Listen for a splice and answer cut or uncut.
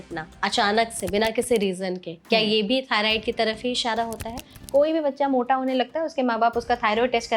cut